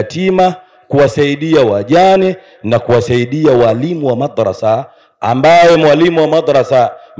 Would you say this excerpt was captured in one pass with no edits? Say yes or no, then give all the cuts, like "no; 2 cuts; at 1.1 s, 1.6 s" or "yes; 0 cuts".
yes; 0 cuts